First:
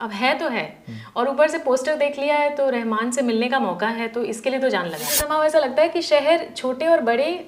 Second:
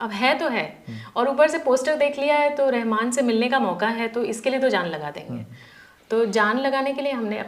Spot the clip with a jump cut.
first; 1 cut; at 5.2 s

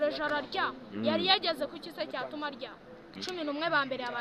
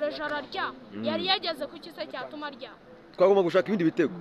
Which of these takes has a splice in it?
first; 1 cut; at 3.1 s

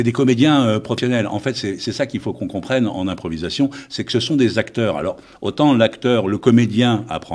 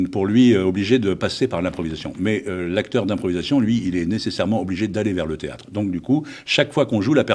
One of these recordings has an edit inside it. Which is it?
first; 1 cut; at 1.0 s

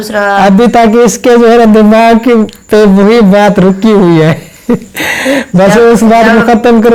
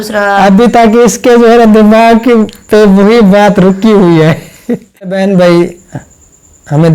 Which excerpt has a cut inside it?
second; 1 cut; at 5.2 s

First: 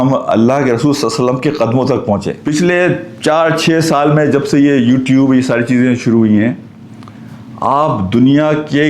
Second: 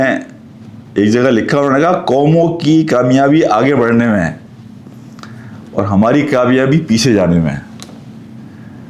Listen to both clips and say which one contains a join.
first; 1 cut; at 2.4 s

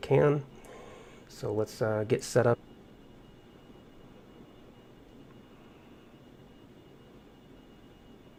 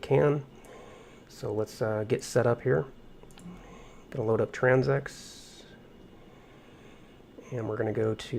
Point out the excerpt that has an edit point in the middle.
second; 1 cut; at 2.6 s

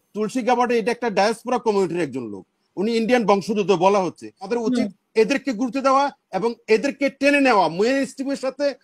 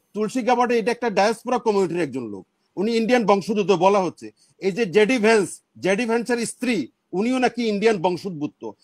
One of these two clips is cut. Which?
first; 1 cut; at 4.5 s

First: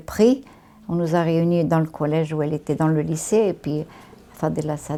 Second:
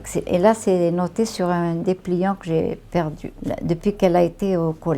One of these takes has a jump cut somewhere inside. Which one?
second; 1 cut; at 3.3 s

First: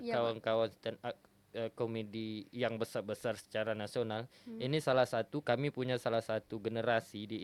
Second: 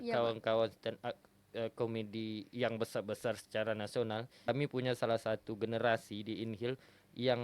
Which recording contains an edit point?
second; 1 cut; at 4.5 s

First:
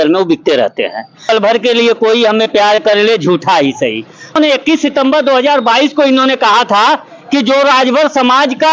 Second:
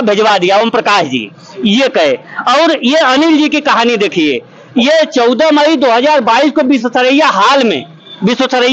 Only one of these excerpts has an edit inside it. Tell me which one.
first; 2 cuts; at 1.2 s, 4.3 s

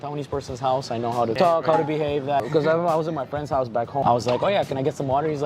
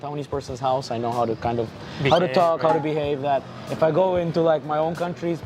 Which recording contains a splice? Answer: first; 3 cuts; at 1.4 s, 2.5 s, 4.0 s

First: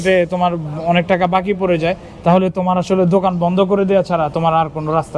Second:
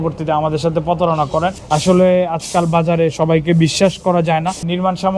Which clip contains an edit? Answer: second; 1 cut; at 1.6 s

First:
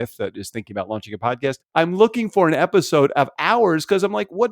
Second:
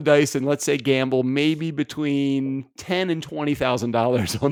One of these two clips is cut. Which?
first; 1 cut; at 1.6 s

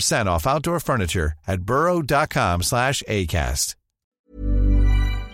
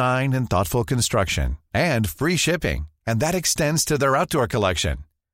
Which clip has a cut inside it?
first; 1 cut; at 4.3 s

